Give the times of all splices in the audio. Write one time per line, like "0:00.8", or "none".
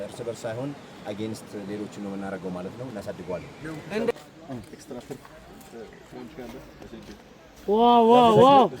0:04.1